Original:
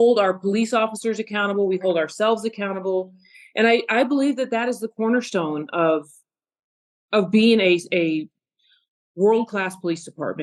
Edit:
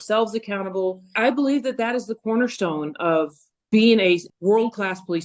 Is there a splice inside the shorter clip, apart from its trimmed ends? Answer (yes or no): yes